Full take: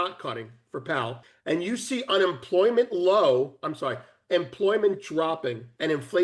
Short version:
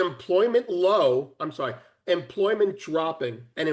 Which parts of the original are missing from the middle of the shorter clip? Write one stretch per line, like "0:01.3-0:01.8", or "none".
none

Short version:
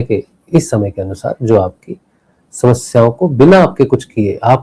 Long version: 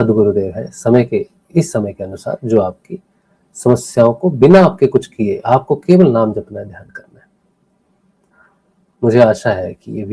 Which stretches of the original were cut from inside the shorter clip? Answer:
none

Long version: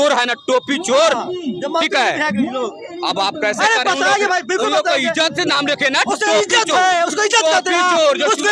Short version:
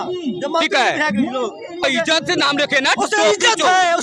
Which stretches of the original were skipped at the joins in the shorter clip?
0:03.0-0:04.9

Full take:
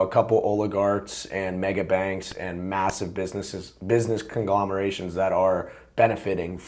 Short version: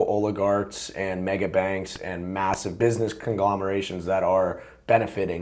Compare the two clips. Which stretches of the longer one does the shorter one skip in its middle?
0:03.0-0:03.8

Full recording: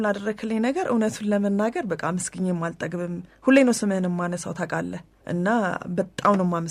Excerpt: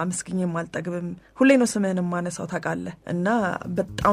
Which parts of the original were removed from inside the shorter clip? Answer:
0:05.0-0:05.1

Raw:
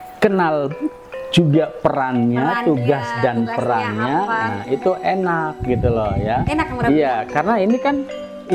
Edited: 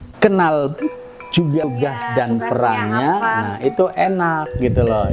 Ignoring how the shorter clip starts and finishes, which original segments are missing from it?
0:01.7-0:02.8

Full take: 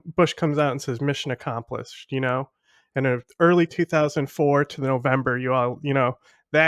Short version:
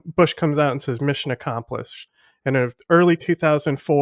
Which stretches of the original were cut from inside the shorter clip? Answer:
0:02.0-0:02.5

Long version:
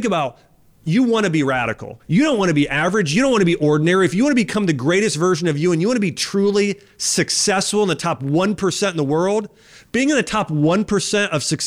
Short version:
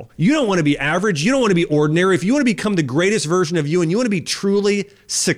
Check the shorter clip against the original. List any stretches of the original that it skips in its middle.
none

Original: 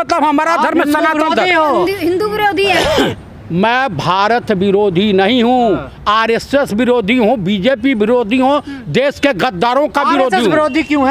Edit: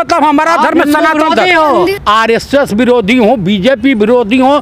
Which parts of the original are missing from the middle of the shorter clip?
0:02.0-0:06.0

